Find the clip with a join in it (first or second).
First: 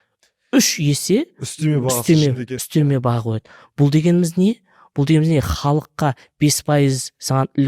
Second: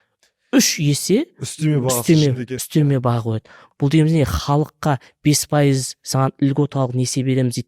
second